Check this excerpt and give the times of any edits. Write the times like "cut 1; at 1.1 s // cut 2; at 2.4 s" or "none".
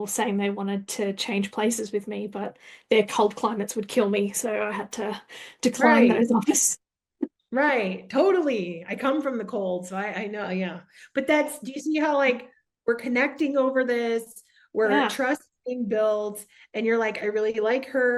none

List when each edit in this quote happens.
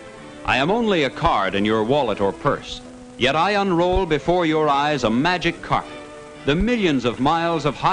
cut 1; at 5.7 s

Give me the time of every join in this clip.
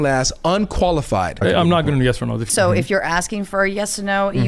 cut 1; at 1.4 s // cut 2; at 2.5 s

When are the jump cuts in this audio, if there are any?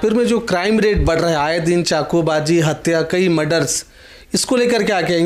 none

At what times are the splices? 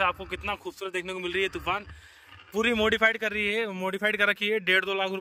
none

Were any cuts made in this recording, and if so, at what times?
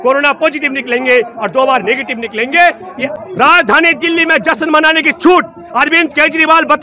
cut 1; at 3.1 s

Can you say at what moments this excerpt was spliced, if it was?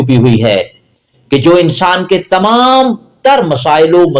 none

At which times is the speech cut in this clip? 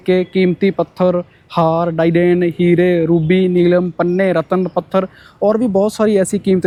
none

